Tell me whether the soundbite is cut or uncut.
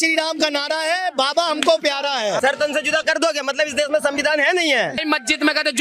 cut